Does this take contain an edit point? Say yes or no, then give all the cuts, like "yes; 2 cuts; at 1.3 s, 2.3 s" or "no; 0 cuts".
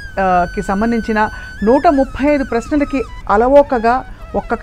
no; 0 cuts